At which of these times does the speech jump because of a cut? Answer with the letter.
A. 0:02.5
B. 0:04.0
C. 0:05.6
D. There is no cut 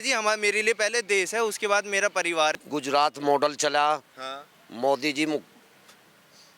A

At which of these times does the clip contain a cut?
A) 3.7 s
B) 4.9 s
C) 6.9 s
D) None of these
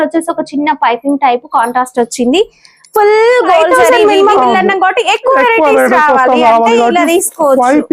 A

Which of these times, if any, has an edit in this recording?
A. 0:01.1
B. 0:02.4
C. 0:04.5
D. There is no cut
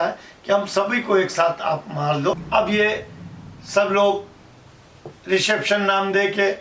B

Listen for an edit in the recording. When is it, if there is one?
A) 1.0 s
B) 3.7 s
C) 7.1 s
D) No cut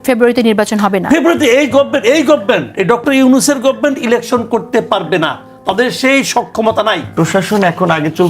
C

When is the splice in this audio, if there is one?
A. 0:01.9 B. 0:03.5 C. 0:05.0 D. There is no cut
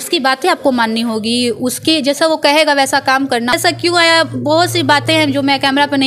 B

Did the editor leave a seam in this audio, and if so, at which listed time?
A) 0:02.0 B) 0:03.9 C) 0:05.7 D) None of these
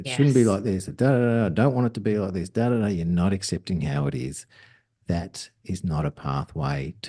D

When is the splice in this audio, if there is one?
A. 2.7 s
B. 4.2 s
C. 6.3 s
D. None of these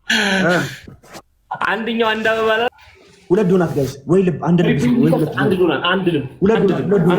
A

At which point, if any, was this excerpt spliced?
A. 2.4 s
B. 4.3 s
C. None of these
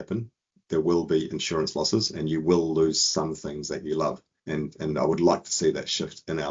B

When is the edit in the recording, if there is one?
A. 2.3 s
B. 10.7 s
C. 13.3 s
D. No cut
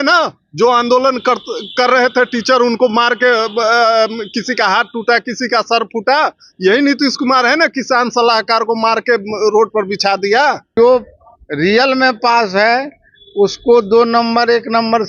B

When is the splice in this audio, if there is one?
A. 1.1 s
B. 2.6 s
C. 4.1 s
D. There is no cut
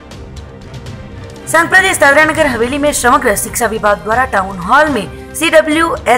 A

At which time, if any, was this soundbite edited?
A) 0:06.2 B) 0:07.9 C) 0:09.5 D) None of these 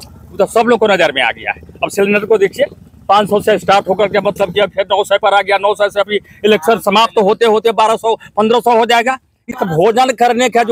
C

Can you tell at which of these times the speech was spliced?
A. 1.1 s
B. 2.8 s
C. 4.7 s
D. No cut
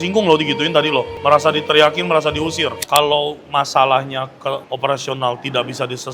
B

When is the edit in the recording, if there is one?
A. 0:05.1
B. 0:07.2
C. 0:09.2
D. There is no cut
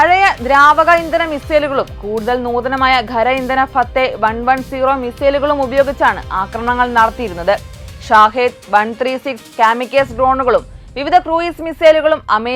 D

